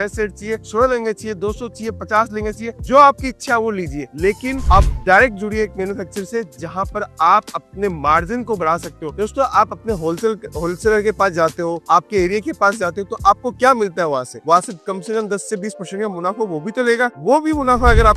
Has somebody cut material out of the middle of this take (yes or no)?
no